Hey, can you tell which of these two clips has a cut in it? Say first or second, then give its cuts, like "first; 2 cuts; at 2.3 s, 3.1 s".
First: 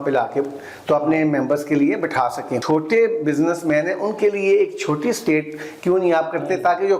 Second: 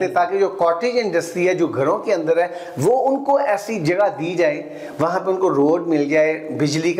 first; 1 cut; at 2.6 s